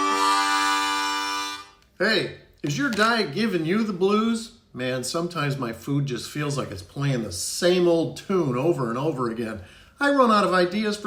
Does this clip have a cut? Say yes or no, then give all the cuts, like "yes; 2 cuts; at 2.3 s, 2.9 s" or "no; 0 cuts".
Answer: no; 0 cuts